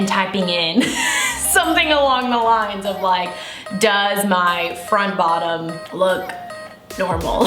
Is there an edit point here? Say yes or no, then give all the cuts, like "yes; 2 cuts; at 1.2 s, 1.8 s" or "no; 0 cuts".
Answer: yes; 1 cut; at 5.8 s